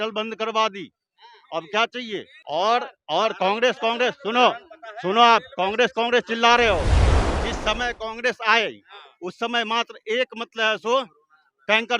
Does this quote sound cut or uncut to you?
cut